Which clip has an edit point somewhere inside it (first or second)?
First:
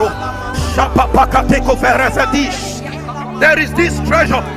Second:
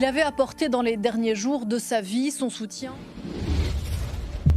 second